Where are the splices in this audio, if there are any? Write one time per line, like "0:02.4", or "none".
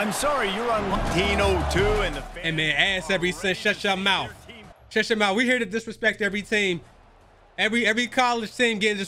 0:00.9

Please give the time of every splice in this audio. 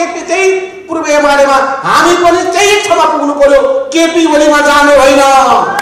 none

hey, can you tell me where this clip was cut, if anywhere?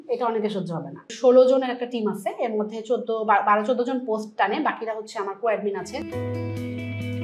0:01.1
0:05.9

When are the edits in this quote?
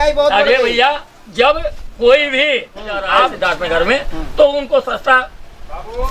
0:03.3

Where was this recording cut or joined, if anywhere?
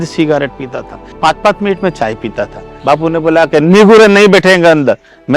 0:01.1
0:02.7

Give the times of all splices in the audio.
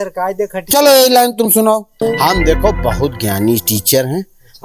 0:01.9

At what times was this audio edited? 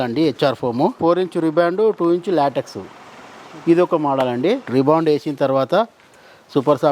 0:01.0
0:04.6

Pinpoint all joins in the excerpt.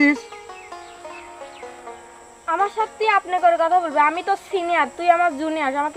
none

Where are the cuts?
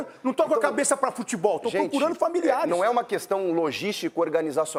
none

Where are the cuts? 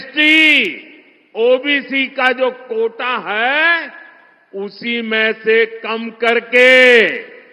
none

